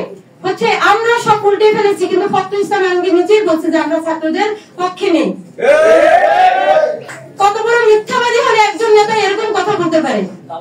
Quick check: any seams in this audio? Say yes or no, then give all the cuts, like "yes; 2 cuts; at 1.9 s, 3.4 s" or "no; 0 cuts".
no; 0 cuts